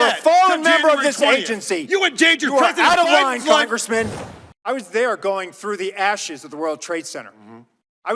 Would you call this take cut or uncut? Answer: cut